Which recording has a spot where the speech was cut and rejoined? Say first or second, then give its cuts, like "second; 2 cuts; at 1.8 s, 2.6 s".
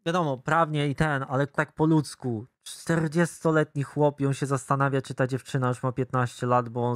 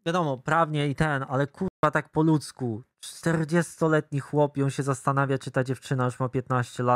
first; 1 cut; at 1.6 s